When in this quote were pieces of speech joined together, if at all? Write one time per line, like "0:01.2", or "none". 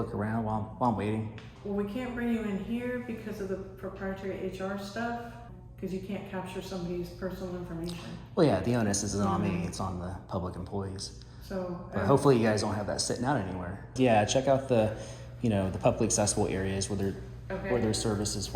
0:01.5
0:05.5
0:13.9